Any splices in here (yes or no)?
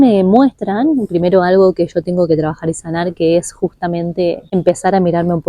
yes